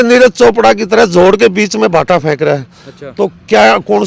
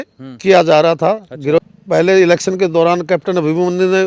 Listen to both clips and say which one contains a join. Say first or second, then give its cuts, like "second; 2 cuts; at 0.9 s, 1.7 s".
second; 1 cut; at 1.6 s